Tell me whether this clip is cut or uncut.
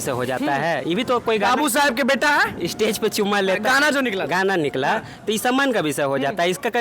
uncut